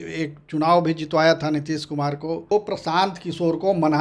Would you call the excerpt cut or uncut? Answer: cut